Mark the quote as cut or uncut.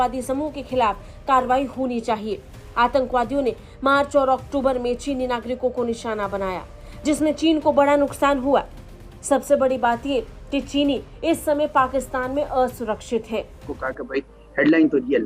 cut